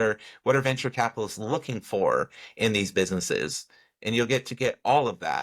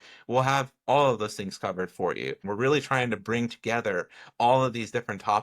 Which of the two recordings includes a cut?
second; 1 cut; at 2.4 s

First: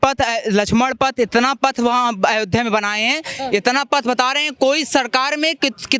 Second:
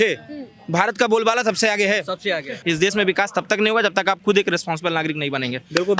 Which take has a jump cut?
second; 1 cut; at 2.5 s

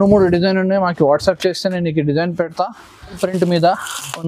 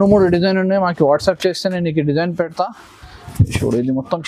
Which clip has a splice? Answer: first; 1 cut; at 3.2 s

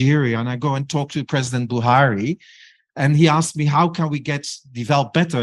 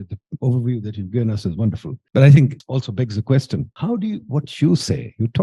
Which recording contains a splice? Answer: second; 3 cuts; at 1.9 s, 2.6 s, 3.7 s

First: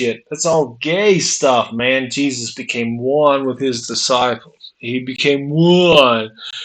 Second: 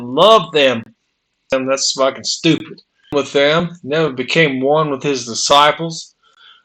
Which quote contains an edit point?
second; 2 cuts; at 1.5 s, 3.1 s

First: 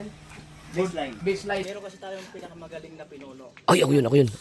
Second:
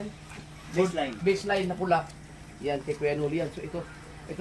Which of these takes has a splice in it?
first; 1 cut; at 1.6 s

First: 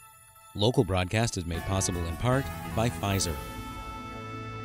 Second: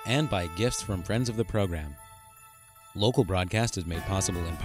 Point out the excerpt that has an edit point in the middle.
first; 1 cut; at 3.4 s

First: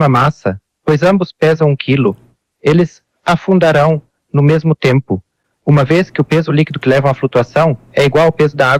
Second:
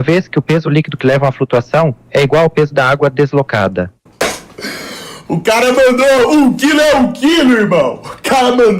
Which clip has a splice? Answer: second; 1 cut; at 4.0 s

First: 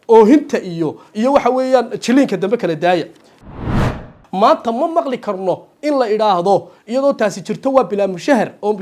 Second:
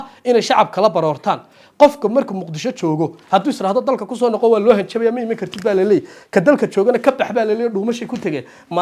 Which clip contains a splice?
first; 1 cut; at 3.6 s

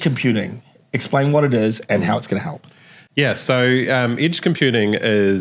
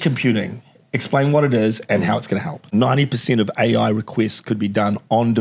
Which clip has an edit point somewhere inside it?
second; 1 cut; at 2.7 s

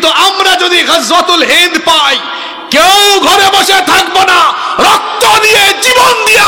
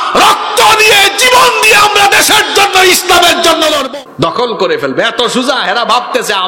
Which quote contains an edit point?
second; 1 cut; at 3.8 s

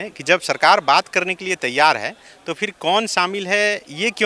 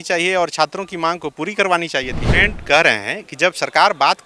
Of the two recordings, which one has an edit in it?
second; 1 cut; at 2.2 s

